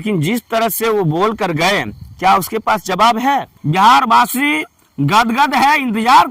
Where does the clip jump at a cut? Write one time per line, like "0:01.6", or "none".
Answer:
0:03.6

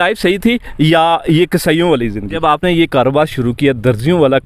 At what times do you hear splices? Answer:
0:02.3

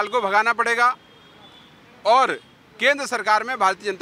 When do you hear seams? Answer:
none

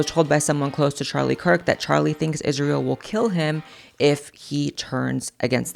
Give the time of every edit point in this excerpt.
none

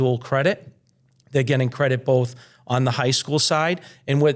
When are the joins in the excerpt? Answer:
none

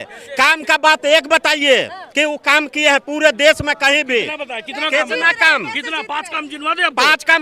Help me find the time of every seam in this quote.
none

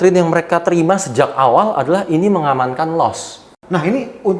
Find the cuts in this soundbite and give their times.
0:03.5

